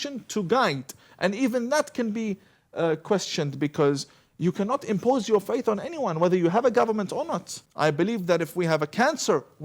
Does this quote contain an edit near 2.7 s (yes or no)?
no